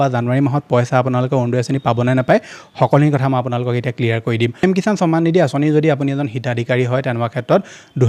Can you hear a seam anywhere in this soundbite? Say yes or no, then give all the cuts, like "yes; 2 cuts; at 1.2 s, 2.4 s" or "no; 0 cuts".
yes; 1 cut; at 4.6 s